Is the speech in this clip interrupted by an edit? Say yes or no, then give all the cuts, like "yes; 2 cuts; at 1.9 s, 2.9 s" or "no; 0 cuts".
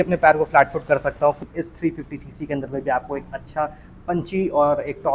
yes; 1 cut; at 1.4 s